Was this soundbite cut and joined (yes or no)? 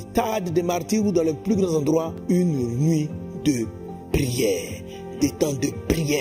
no